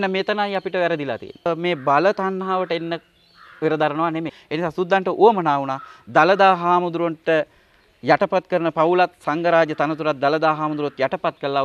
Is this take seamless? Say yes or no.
no